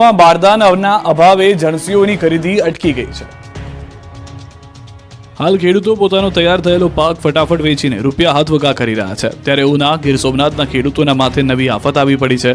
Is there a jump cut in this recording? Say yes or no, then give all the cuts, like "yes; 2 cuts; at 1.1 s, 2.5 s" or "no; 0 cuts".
no; 0 cuts